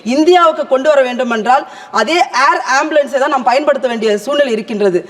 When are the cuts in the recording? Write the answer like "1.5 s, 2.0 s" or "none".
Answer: none